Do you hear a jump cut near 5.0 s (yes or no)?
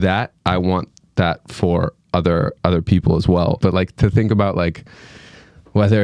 no